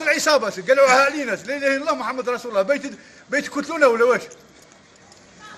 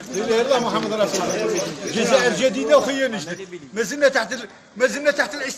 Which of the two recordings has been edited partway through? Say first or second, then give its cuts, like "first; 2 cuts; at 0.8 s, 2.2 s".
second; 1 cut; at 2.9 s